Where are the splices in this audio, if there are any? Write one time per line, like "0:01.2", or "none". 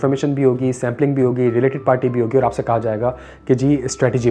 none